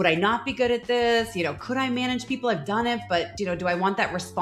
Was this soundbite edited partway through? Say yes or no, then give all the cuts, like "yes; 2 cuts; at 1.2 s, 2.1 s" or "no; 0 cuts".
no; 0 cuts